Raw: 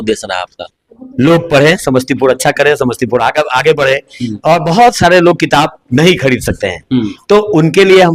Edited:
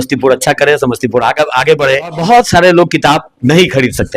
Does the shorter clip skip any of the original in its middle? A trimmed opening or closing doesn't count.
yes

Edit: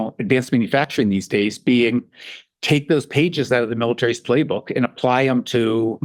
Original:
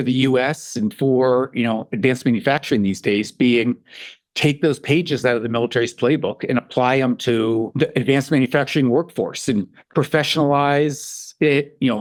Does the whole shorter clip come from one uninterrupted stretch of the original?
yes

